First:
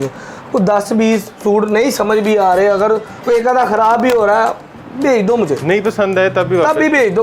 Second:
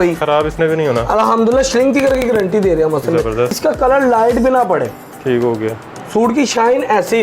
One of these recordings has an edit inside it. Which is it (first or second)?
second